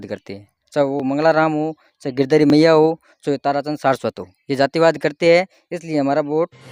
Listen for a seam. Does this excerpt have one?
no; 0 cuts

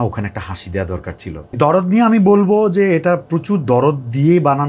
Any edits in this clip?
yes; 1 cut; at 1.5 s

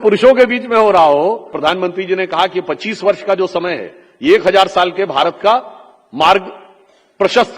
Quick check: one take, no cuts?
no; 1 cut; at 1.6 s

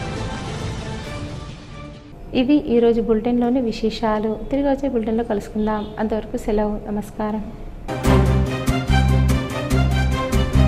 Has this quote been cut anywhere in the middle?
no; 0 cuts

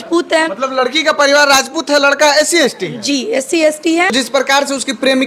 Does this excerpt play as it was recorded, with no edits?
no; 1 cut; at 4.1 s

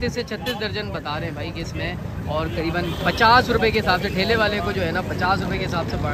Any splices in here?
no; 0 cuts

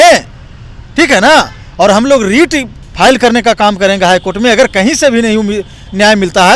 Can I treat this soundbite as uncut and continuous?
yes; 0 cuts

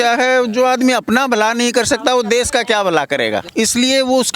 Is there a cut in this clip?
yes; 1 cut; at 3.5 s

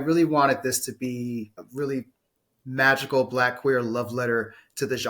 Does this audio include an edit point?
no; 0 cuts

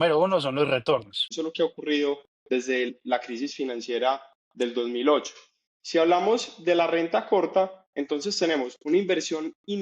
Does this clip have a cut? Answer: yes; 1 cut; at 1.2 s

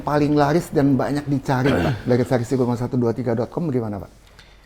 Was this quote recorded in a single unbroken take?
yes; 0 cuts

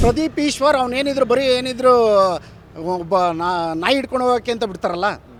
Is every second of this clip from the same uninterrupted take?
yes; 0 cuts

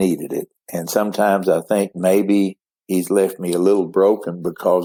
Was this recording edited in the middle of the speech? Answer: no; 0 cuts

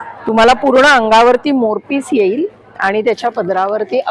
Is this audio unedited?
yes; 0 cuts

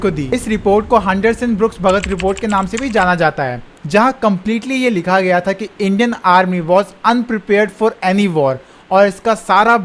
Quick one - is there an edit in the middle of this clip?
no; 0 cuts

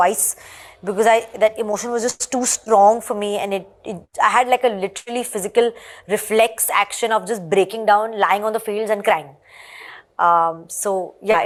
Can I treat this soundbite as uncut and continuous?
yes; 0 cuts

